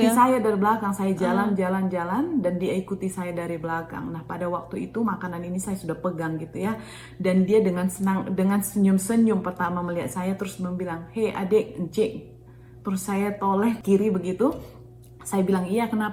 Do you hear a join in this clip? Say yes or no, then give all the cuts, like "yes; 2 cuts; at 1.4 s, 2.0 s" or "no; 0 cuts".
yes; 1 cut; at 13.8 s